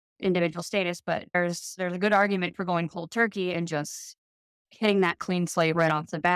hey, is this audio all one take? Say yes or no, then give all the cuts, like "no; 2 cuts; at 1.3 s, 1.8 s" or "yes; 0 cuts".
no; 1 cut; at 1.3 s